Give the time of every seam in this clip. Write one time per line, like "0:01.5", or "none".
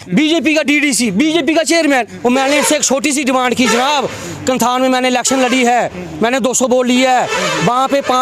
0:02.1